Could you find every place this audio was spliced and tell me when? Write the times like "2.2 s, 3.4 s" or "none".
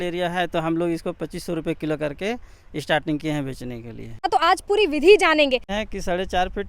4.2 s, 5.7 s